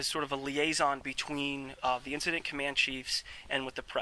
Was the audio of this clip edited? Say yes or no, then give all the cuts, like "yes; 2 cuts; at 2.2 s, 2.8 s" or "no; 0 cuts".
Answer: no; 0 cuts